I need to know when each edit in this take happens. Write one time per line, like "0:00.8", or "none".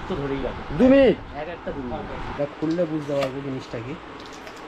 0:02.2